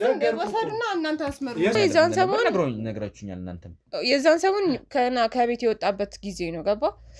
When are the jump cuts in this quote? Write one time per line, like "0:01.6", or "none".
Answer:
0:01.8